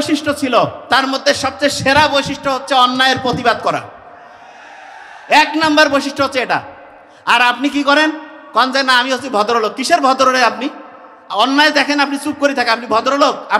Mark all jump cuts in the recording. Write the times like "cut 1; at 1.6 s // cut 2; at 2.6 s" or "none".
none